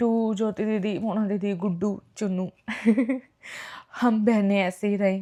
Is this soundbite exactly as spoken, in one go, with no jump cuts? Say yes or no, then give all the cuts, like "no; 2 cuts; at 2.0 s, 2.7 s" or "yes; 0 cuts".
yes; 0 cuts